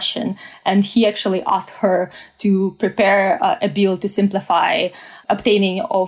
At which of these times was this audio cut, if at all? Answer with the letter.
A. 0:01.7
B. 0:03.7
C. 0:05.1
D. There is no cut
C